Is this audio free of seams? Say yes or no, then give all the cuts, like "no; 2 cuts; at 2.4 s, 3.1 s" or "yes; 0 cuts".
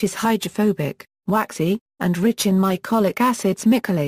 no; 1 cut; at 2.7 s